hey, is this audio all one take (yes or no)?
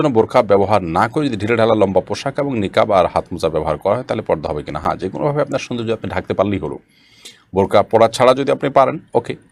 yes